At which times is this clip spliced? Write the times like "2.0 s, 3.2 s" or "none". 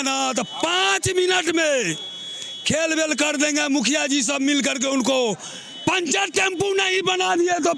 none